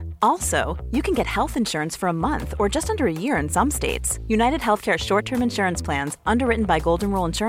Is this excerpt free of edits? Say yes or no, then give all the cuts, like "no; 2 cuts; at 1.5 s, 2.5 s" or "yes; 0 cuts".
yes; 0 cuts